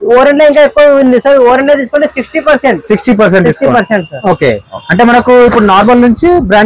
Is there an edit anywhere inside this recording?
no; 0 cuts

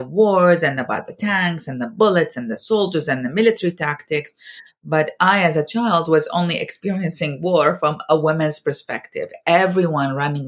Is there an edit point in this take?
no; 0 cuts

